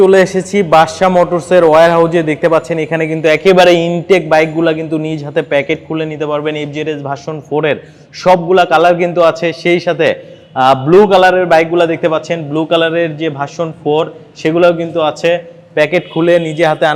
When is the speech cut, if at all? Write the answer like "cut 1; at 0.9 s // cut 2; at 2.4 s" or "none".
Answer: none